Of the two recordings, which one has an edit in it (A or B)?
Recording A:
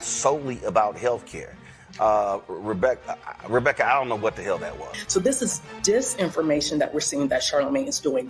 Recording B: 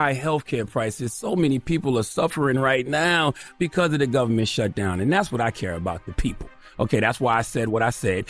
A